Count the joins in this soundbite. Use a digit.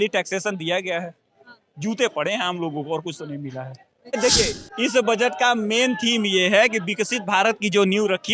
1